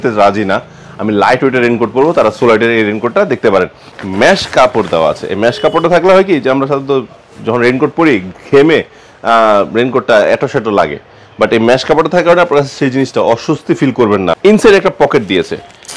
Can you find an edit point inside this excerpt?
yes; 2 cuts; at 3.9 s, 14.4 s

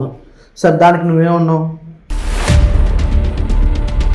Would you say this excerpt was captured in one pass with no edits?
yes; 0 cuts

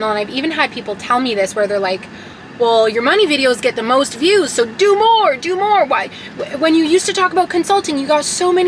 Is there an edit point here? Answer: no; 0 cuts

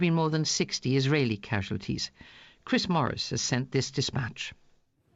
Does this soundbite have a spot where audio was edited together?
yes; 1 cut; at 2.6 s

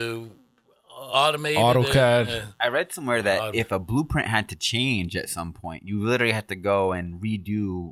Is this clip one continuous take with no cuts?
yes; 0 cuts

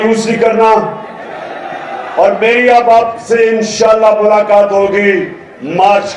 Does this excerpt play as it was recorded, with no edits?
yes; 0 cuts

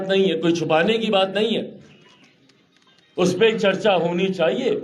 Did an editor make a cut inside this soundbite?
no; 0 cuts

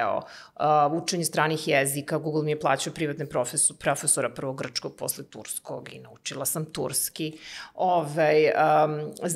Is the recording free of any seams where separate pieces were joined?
yes; 0 cuts

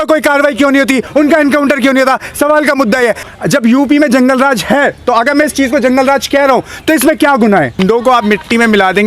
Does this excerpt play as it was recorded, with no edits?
no; 2 cuts; at 3.3 s, 7.8 s

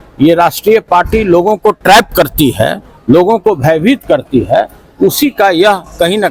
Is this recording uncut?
yes; 0 cuts

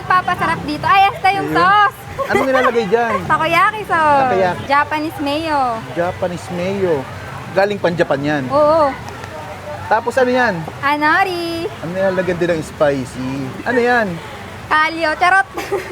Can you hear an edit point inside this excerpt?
yes; 6 cuts; at 3.2 s, 4.6 s, 9.0 s, 11.8 s, 13.6 s, 14.6 s

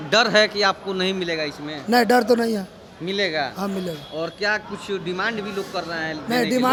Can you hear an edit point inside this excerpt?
no; 0 cuts

